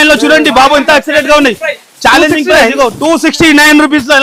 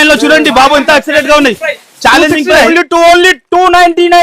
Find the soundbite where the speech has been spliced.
second; 1 cut; at 2.7 s

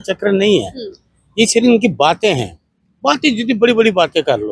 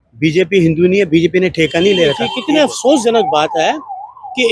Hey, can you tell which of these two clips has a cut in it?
second; 1 cut; at 2.3 s

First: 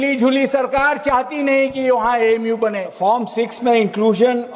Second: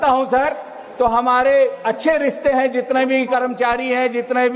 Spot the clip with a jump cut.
first; 1 cut; at 2.9 s

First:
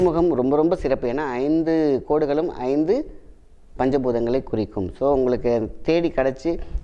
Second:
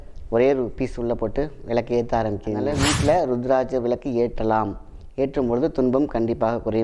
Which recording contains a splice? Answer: second; 1 cut; at 2.7 s

